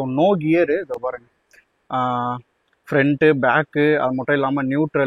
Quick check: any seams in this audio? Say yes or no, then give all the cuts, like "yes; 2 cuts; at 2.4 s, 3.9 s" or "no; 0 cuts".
no; 0 cuts